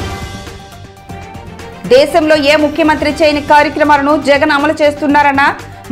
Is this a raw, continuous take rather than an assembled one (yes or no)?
no